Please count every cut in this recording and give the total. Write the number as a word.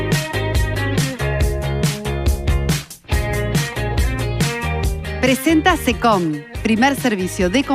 one